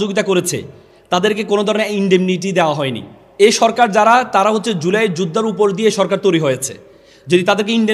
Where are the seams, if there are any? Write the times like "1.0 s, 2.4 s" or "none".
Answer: 3.2 s